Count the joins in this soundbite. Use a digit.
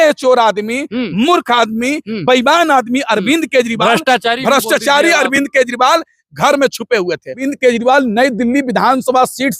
1